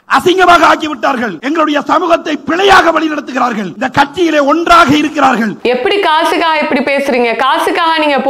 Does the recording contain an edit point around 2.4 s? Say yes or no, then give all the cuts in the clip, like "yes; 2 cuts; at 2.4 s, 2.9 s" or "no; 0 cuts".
no; 1 cut; at 5.6 s